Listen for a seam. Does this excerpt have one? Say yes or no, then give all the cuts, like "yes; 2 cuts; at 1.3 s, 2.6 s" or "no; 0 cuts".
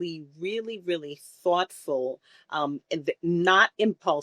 no; 0 cuts